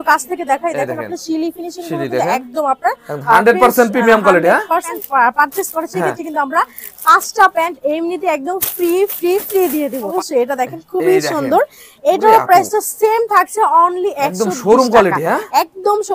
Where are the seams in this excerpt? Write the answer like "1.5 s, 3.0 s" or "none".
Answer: 5.0 s, 10.1 s